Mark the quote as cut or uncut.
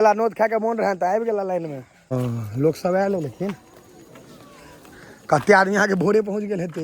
cut